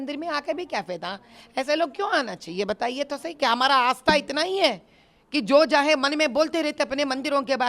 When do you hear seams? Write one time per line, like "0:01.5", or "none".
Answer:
none